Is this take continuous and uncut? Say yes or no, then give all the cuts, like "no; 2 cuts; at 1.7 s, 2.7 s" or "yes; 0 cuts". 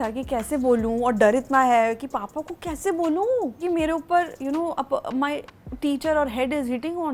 yes; 0 cuts